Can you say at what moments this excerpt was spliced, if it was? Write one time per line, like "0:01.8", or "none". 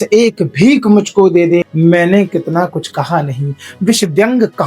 0:01.7

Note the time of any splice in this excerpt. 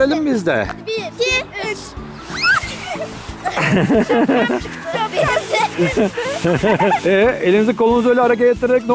none

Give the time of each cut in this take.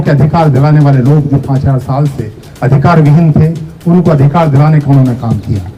none

